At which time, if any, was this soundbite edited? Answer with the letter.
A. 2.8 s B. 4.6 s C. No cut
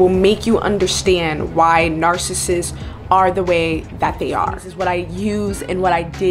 B